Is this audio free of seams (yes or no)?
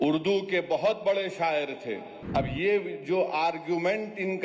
no